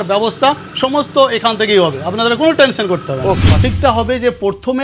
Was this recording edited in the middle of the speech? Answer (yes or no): yes